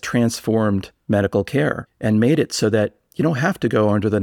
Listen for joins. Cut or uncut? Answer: cut